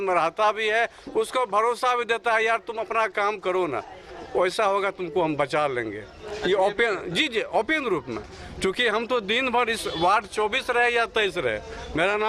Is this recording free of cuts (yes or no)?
yes